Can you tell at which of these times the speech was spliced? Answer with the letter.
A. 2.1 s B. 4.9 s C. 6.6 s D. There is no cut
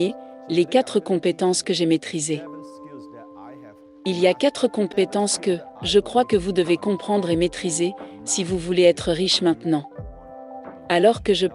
B